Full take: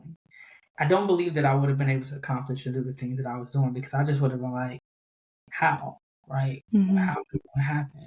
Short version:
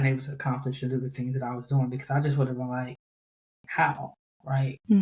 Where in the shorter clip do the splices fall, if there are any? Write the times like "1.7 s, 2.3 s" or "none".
none